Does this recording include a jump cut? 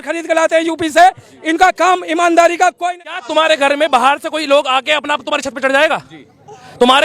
yes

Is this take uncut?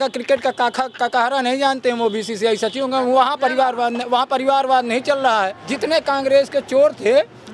no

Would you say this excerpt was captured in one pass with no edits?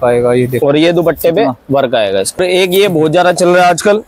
no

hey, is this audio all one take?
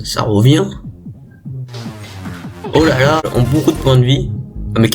no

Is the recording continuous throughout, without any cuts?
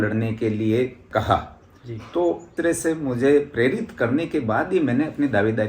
no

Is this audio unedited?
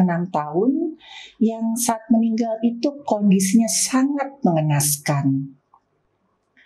yes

